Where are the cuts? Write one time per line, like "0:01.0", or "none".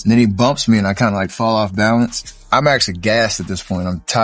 0:02.5